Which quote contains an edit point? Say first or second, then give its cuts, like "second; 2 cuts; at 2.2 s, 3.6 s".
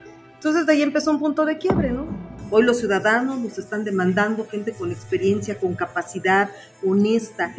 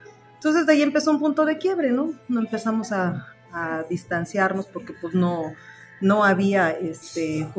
first; 1 cut; at 2.2 s